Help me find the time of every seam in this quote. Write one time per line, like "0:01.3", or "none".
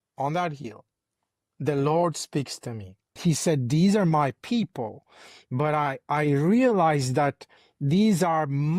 0:03.2